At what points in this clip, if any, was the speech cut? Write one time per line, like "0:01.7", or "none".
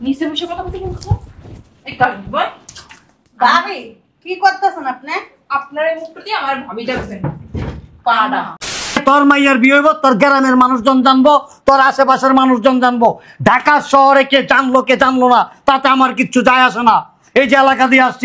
0:09.0